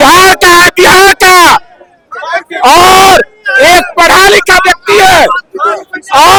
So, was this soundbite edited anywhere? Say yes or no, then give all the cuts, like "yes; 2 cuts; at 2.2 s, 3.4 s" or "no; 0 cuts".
no; 0 cuts